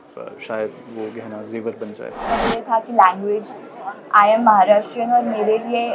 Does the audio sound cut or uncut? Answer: cut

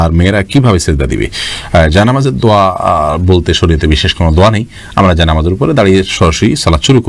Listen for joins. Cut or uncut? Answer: uncut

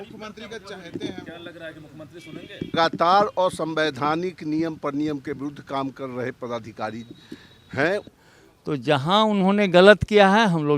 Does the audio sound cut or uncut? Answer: cut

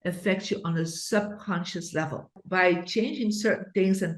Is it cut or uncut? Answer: cut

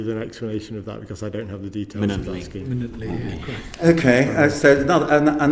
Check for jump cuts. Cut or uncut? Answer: uncut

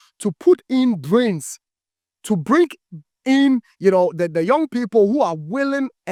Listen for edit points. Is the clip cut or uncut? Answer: uncut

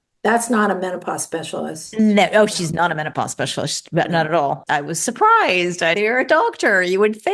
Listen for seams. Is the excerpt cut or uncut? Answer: cut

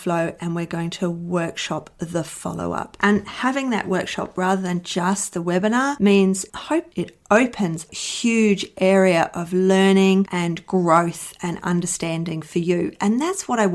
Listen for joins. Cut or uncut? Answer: cut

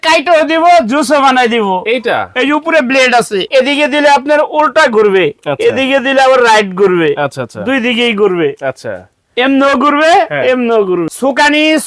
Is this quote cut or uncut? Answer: cut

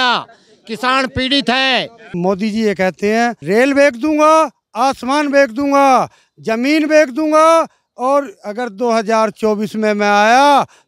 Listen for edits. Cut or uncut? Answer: cut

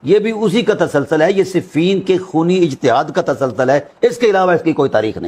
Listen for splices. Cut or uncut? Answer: uncut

